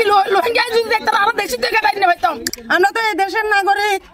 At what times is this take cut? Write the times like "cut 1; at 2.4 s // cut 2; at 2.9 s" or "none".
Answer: cut 1; at 2.5 s